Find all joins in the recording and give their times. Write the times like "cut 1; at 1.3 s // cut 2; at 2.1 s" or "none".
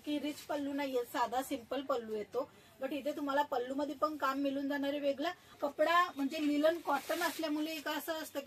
cut 1; at 5.6 s